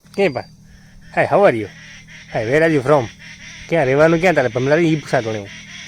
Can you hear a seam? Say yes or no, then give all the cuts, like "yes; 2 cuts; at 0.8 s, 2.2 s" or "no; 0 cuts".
no; 0 cuts